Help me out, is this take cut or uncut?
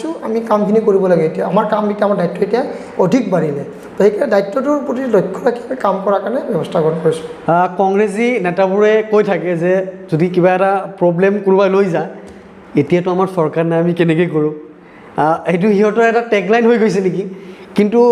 uncut